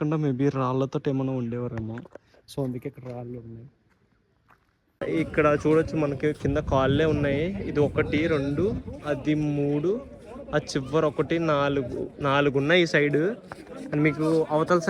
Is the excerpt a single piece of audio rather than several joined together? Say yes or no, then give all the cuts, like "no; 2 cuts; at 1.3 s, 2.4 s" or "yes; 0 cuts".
no; 1 cut; at 5.0 s